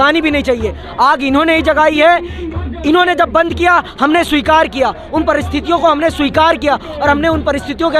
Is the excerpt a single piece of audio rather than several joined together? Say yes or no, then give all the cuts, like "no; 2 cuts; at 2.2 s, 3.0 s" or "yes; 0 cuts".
yes; 0 cuts